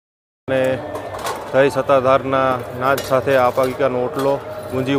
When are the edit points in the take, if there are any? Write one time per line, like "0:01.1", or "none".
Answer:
none